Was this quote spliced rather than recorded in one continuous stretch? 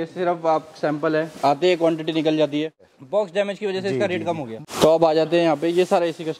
yes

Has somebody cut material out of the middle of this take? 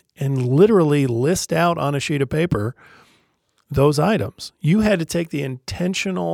no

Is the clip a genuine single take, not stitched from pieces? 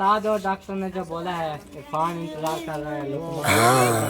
yes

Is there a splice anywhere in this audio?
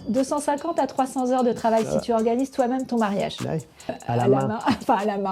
yes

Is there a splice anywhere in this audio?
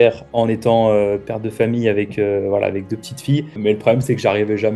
yes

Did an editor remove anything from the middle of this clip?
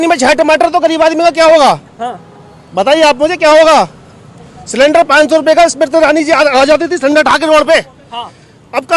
no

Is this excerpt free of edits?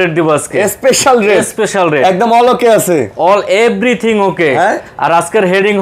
yes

